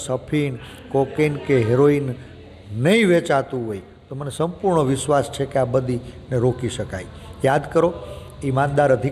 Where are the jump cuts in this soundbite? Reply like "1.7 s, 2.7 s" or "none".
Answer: none